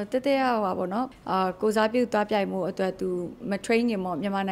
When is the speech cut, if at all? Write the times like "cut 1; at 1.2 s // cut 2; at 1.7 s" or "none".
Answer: cut 1; at 1.1 s